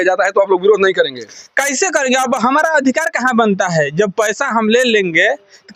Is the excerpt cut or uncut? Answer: uncut